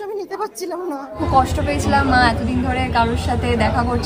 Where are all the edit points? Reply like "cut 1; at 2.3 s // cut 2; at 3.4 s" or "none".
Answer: cut 1; at 1.2 s